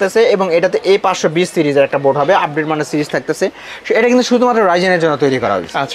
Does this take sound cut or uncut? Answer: uncut